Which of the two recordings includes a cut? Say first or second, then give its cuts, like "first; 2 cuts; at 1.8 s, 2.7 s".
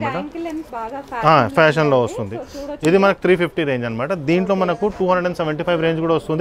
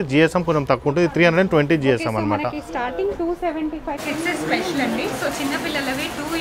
second; 1 cut; at 4.0 s